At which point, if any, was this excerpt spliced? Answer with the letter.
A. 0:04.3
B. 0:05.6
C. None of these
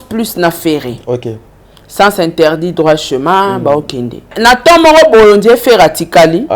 A